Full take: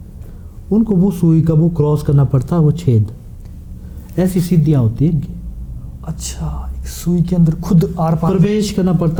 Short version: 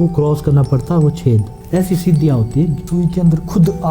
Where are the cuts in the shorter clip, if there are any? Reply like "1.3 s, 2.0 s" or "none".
1.5 s, 2.8 s